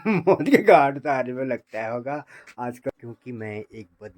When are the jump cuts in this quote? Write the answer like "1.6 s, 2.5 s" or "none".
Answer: 2.9 s